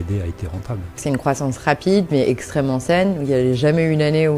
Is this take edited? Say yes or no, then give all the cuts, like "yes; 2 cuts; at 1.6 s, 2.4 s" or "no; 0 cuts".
yes; 1 cut; at 1.0 s